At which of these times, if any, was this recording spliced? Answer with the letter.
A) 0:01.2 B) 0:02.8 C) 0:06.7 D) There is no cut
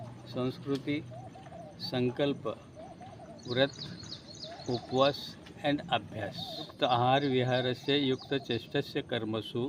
C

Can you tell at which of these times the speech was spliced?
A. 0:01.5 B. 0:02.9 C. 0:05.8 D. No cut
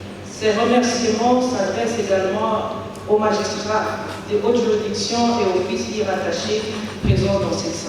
D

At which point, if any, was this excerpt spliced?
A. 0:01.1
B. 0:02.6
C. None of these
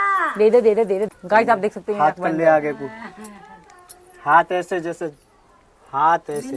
A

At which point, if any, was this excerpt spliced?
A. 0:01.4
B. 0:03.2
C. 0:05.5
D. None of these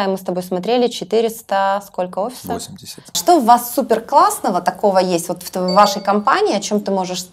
B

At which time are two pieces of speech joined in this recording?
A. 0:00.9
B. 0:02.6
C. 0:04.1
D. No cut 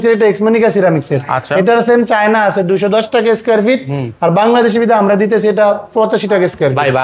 D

